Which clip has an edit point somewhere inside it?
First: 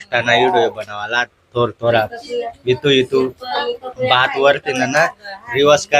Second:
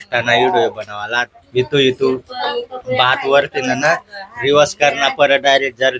second; 1 cut; at 1.4 s

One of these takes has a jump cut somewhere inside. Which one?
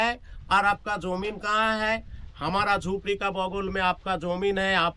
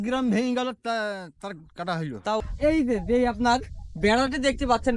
second; 1 cut; at 2.5 s

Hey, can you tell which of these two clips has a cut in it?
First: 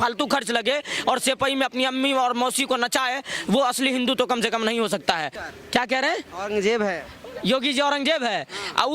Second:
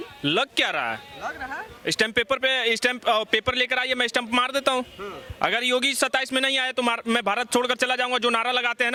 first; 1 cut; at 5.5 s

